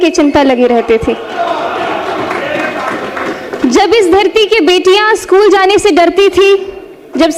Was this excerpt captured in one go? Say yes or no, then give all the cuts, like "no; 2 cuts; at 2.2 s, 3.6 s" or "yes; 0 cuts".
yes; 0 cuts